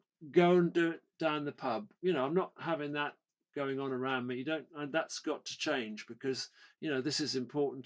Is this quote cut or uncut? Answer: cut